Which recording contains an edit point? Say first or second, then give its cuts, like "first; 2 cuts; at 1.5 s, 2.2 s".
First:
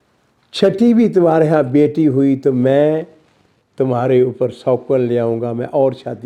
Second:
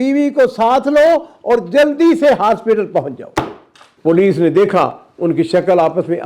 second; 1 cut; at 3.9 s